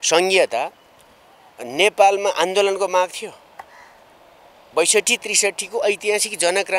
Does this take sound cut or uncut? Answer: uncut